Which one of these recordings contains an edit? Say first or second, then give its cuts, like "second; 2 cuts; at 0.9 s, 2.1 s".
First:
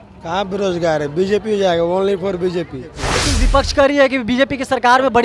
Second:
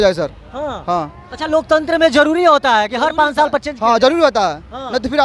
first; 1 cut; at 3.0 s